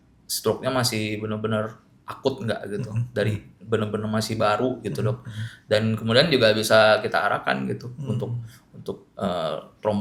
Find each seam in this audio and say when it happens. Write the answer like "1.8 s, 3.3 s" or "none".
none

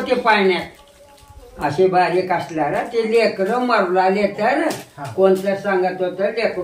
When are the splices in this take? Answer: none

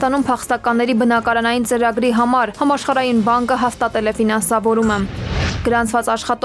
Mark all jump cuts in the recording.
none

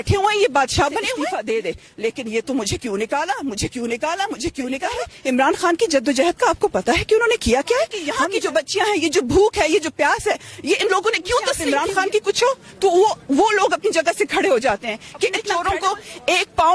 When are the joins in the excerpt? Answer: 1.1 s, 5.1 s, 8.1 s, 11.6 s, 15.5 s

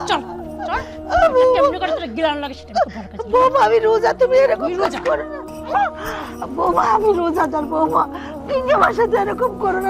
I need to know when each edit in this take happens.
5.4 s

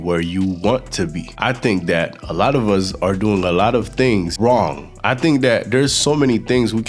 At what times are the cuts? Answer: 1.2 s, 4.3 s

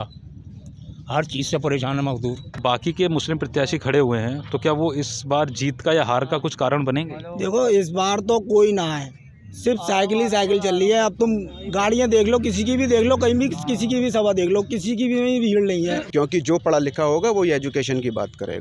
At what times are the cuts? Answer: 2.6 s, 16.0 s

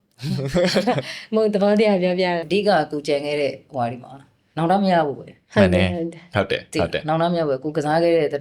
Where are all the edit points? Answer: 2.4 s

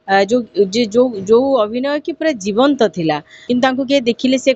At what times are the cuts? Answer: 3.3 s

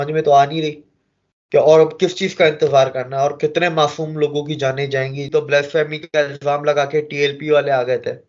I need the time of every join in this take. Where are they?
5.2 s

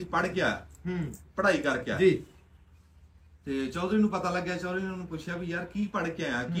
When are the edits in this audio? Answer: none

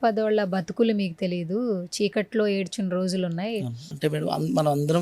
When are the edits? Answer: 3.8 s

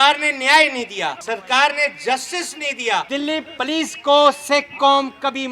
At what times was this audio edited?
1.2 s, 3.1 s

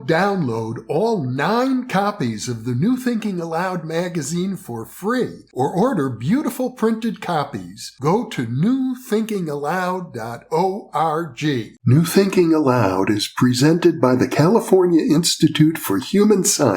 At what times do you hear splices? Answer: 11.7 s

